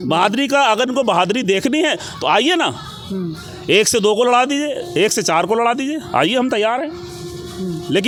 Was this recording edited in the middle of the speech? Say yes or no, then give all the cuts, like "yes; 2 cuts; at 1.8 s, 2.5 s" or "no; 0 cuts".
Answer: no; 0 cuts